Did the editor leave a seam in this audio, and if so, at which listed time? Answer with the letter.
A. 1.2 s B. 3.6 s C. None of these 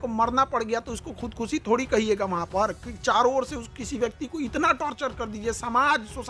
C